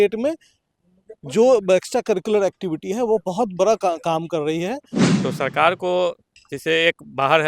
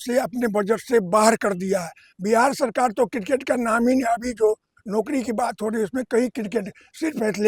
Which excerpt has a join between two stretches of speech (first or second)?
first